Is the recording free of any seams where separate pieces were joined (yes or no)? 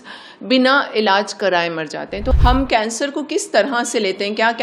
no